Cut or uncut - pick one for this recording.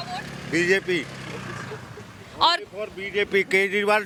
uncut